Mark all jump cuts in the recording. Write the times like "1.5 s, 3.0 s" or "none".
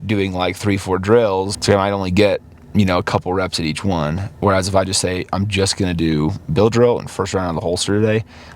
1.5 s